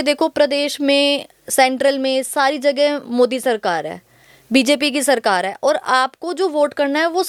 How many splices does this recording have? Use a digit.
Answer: 0